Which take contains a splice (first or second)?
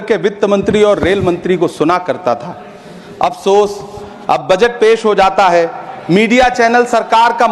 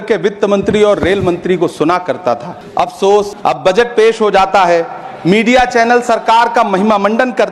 second